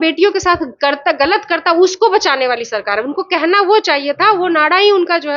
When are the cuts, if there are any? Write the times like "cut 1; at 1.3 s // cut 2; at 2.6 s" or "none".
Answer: none

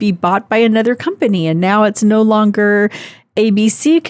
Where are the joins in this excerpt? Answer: none

